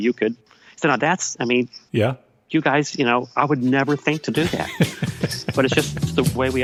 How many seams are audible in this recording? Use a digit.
0